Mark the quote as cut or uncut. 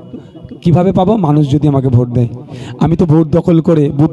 uncut